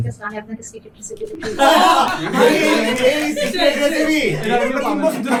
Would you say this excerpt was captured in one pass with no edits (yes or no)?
yes